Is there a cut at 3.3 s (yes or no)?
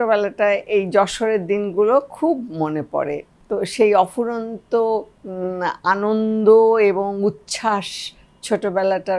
yes